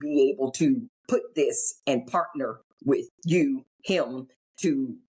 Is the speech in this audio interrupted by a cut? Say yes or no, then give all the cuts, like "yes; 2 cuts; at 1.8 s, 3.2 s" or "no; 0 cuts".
yes; 2 cuts; at 0.9 s, 3.7 s